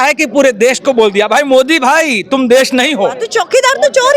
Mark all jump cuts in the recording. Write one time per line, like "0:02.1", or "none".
0:03.2